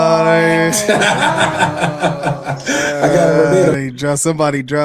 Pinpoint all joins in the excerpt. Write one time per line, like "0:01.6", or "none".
none